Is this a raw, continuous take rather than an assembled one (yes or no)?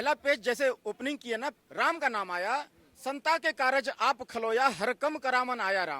no